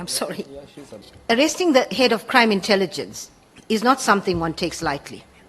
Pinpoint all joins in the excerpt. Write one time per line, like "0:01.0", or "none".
0:01.1